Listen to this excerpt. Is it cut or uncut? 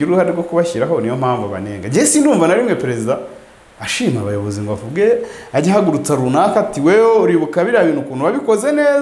uncut